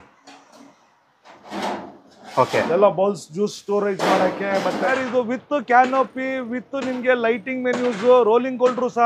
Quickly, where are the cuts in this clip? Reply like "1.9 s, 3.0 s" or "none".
4.8 s